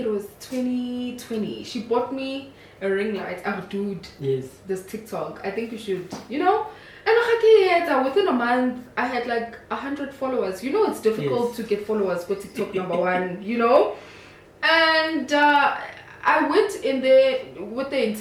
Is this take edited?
no; 0 cuts

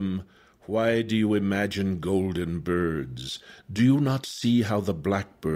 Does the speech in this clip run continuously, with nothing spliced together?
yes; 0 cuts

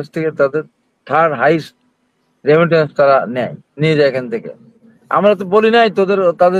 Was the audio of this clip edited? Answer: no; 0 cuts

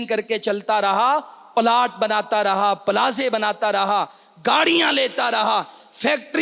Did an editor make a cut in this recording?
no; 0 cuts

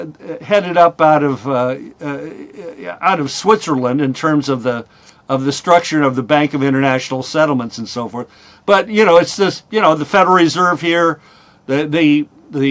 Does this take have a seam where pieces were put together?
no; 0 cuts

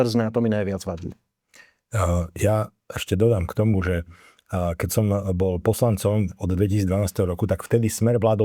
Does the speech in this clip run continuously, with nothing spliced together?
yes; 0 cuts

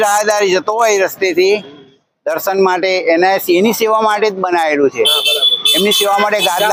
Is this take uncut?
yes; 0 cuts

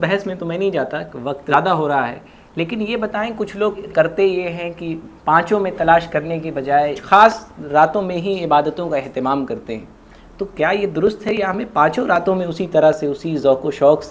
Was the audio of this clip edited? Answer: yes; 3 cuts; at 1.5 s, 3.8 s, 7.0 s

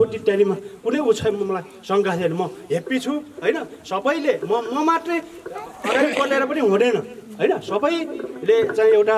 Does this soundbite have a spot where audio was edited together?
no; 0 cuts

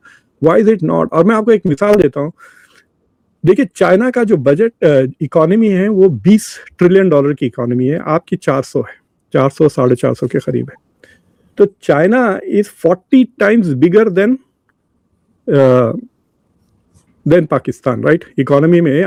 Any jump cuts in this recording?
no; 0 cuts

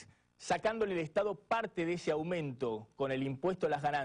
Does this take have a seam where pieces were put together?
yes; 1 cut; at 2.9 s

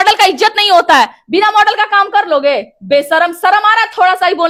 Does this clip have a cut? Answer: no; 0 cuts

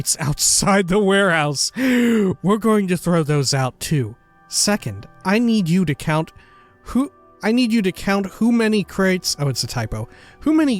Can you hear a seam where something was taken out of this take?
yes; 1 cut; at 7.2 s

